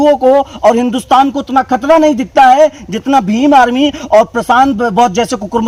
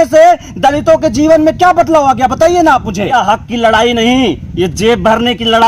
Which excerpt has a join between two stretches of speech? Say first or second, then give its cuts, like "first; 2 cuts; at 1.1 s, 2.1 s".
second; 1 cut; at 3.1 s